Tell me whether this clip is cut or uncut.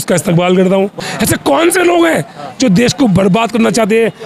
cut